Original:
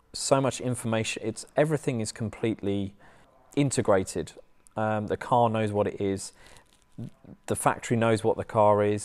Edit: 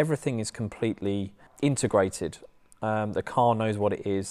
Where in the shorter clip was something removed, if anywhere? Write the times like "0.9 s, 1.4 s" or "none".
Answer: 1.4 s